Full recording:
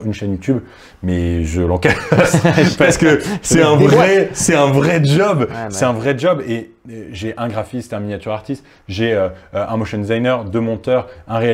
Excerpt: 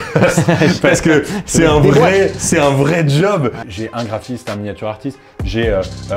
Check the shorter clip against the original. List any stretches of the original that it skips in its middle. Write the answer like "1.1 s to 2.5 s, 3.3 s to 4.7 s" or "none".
5.6 s to 7.1 s